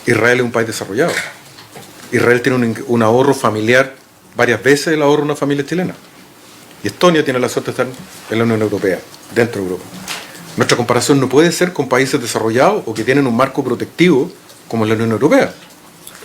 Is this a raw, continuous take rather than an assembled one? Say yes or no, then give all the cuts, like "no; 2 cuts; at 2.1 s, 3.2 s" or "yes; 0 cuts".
yes; 0 cuts